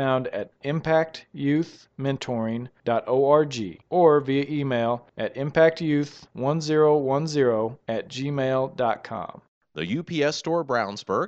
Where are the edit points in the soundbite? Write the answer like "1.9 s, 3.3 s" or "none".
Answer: 9.5 s